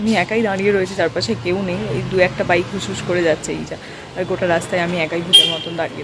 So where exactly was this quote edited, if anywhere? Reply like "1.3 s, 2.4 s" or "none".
none